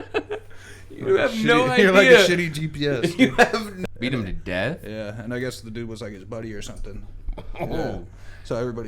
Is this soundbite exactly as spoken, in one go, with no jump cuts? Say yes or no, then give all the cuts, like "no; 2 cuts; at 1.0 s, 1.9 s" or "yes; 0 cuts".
no; 1 cut; at 3.7 s